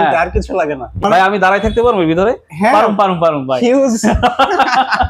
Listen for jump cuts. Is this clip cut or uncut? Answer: cut